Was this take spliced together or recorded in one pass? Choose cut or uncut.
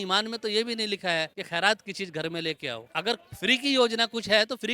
cut